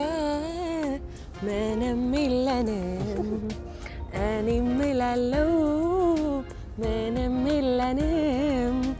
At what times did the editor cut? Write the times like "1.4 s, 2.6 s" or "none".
none